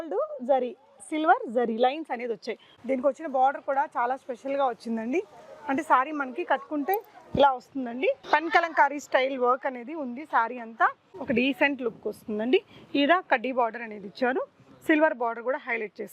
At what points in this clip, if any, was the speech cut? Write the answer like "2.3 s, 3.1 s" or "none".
2.7 s, 11.1 s

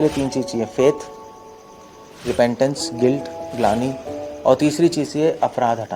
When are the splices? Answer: none

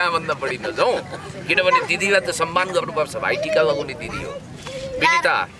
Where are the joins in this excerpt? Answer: none

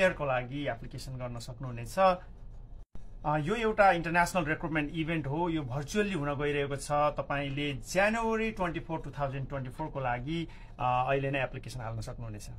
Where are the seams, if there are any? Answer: none

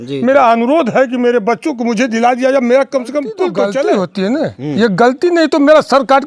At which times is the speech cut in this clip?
3.7 s

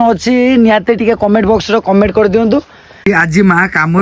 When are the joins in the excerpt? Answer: 3.1 s

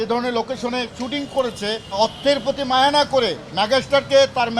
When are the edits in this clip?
1.9 s

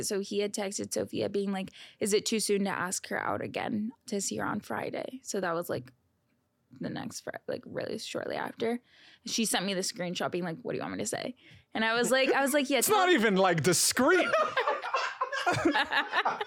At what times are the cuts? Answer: none

